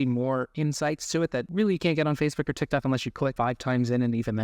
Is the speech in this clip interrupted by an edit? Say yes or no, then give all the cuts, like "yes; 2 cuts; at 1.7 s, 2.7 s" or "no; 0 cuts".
yes; 2 cuts; at 1.5 s, 3.3 s